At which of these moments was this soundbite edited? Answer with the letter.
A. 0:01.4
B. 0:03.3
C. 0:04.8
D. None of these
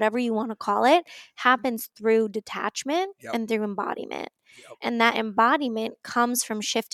C